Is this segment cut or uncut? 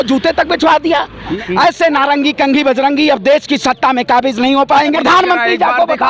cut